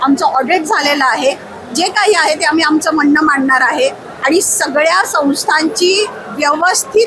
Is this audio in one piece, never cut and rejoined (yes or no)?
yes